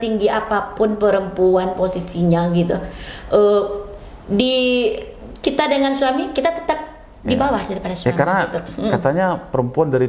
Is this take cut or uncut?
uncut